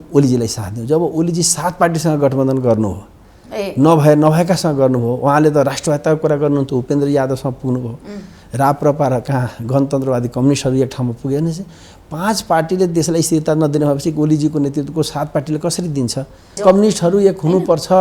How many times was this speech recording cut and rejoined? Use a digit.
1